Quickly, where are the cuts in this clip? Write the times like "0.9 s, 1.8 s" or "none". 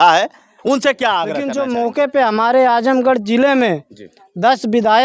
1.4 s